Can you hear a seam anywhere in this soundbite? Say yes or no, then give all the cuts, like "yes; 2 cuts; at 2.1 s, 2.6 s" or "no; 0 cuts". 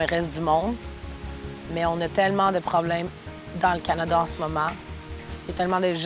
no; 0 cuts